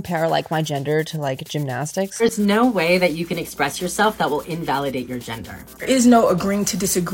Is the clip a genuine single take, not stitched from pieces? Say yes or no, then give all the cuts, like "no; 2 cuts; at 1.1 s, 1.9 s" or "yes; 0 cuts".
no; 2 cuts; at 2.2 s, 5.8 s